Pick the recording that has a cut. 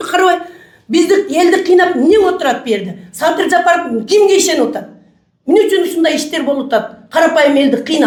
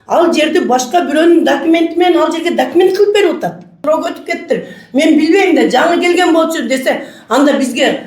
second; 1 cut; at 3.8 s

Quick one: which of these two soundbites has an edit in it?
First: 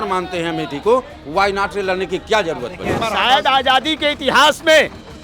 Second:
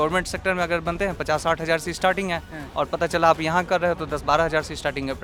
first; 1 cut; at 3.0 s

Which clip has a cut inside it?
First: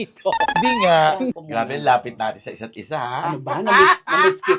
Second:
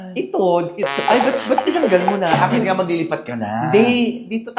first; 1 cut; at 1.4 s

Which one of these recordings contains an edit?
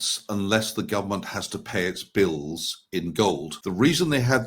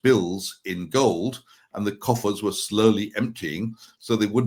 first; 1 cut; at 3.5 s

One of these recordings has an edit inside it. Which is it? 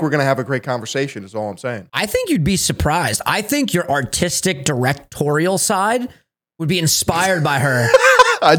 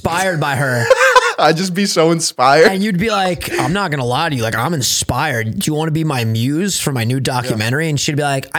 first; 1 cut; at 1.9 s

